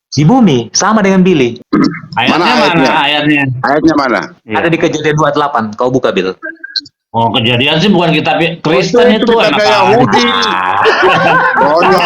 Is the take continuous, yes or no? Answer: no